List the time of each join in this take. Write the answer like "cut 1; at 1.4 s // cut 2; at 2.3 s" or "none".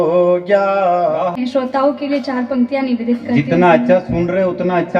cut 1; at 1.3 s